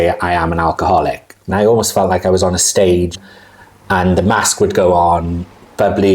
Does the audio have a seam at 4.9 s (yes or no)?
no